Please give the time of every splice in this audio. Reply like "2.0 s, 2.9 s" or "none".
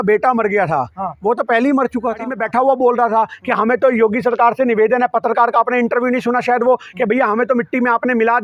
2.3 s